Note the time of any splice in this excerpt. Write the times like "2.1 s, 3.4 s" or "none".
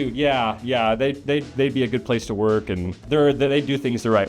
2.9 s